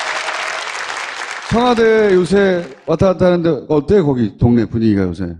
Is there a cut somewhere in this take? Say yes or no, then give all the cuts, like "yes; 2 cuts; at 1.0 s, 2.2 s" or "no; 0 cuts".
no; 0 cuts